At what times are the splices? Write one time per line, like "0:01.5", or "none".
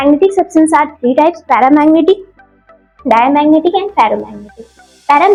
none